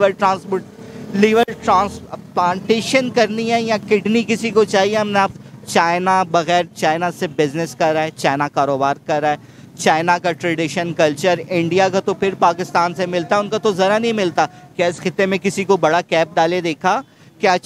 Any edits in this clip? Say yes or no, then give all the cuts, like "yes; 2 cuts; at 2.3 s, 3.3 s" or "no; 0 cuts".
no; 0 cuts